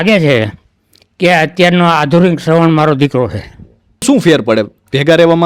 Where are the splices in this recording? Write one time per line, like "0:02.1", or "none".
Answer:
0:04.0